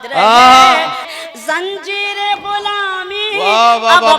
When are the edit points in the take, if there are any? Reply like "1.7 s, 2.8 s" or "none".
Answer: 1.1 s